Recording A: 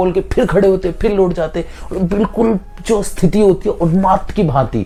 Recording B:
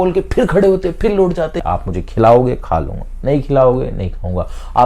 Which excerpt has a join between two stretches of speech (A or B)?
B